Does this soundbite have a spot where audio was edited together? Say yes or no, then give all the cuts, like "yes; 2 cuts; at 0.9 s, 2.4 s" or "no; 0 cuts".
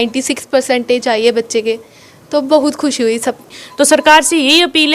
yes; 1 cut; at 3.5 s